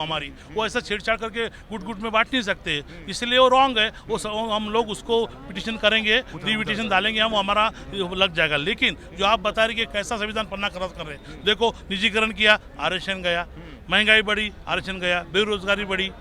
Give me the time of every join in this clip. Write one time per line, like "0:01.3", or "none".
none